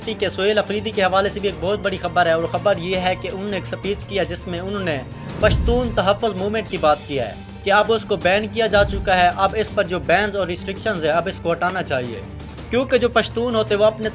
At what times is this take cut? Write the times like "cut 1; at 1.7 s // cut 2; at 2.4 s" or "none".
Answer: none